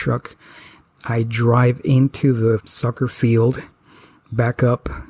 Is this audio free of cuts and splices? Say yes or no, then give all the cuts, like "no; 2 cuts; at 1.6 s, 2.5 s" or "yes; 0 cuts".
no; 1 cut; at 2.7 s